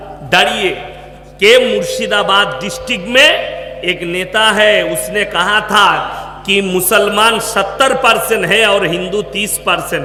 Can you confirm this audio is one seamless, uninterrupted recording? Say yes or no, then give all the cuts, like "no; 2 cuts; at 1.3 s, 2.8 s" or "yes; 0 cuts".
yes; 0 cuts